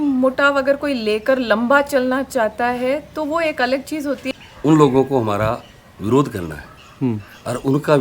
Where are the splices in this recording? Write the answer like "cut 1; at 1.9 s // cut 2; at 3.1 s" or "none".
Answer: cut 1; at 4.3 s